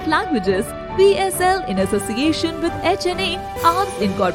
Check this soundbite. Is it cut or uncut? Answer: uncut